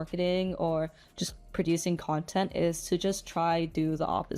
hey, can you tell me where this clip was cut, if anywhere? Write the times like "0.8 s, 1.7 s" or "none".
none